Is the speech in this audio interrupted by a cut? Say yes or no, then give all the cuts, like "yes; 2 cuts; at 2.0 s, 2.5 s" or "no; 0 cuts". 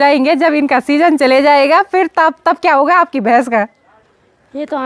no; 0 cuts